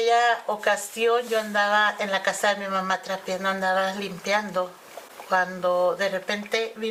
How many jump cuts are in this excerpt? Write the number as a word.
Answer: zero